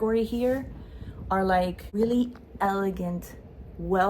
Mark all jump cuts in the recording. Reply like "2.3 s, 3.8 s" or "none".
1.8 s